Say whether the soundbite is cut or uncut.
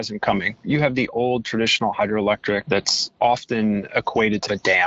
uncut